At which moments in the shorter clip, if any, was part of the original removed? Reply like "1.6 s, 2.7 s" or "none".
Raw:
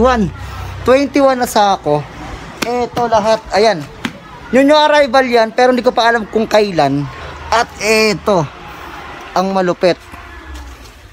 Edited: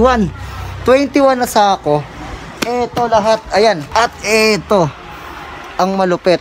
3.8 s